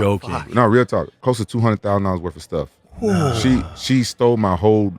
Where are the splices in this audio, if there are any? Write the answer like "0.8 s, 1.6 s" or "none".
1.1 s